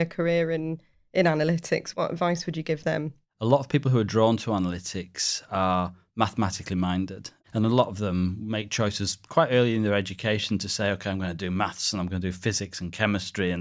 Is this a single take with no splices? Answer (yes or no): no